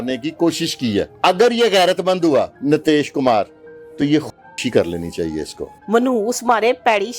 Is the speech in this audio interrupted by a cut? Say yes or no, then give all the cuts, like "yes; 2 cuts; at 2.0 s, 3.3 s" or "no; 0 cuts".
yes; 3 cuts; at 1.1 s, 2.5 s, 5.7 s